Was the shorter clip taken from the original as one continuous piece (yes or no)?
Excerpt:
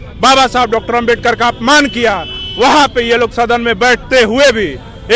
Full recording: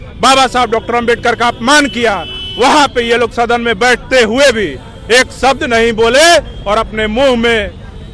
yes